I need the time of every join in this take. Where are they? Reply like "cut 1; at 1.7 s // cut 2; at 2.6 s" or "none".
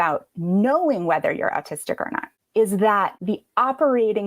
cut 1; at 3.1 s